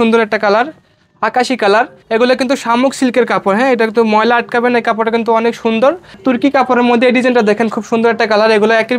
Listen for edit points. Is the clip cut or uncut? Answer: cut